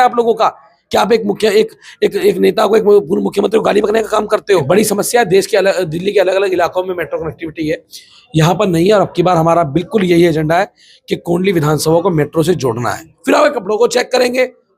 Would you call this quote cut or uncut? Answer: cut